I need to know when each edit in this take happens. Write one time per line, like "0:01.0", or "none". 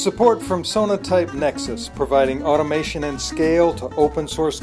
none